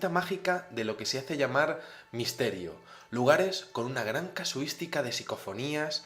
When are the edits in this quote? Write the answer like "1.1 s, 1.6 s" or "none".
4.9 s

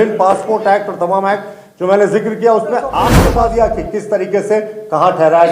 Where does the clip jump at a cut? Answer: 3.1 s

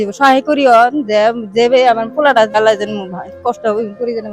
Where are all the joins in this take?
2.6 s

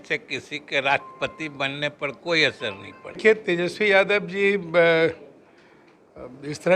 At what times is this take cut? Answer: 3.2 s

